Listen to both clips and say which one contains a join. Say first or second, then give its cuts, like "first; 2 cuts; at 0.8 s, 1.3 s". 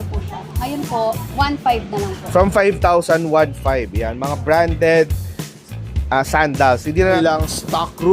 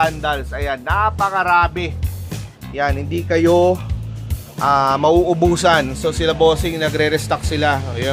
first; 1 cut; at 7.0 s